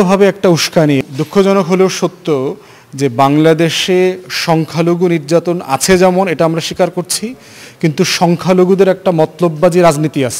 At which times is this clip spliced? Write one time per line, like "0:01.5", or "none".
0:01.0